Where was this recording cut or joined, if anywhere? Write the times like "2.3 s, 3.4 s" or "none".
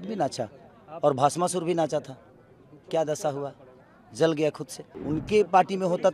4.9 s